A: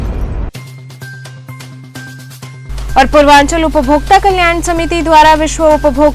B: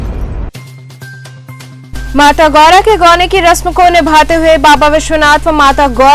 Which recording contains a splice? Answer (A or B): A